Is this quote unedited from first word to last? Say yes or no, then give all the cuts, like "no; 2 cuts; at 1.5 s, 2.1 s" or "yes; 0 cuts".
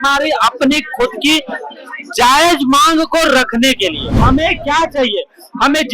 no; 1 cut; at 4.1 s